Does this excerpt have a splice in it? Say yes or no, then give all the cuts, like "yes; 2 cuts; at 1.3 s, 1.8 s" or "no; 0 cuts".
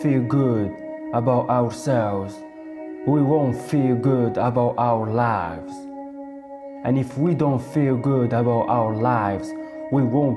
no; 0 cuts